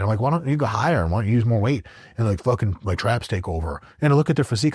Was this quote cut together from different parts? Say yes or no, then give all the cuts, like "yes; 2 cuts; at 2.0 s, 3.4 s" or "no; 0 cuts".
no; 0 cuts